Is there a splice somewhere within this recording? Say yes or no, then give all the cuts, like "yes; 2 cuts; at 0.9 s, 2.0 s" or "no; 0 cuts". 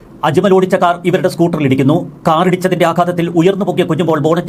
no; 0 cuts